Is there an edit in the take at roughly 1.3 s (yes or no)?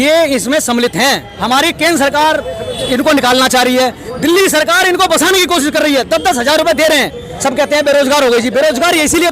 yes